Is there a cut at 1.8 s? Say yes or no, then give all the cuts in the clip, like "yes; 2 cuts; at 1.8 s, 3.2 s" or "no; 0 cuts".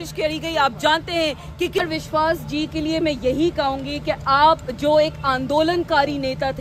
yes; 1 cut; at 1.8 s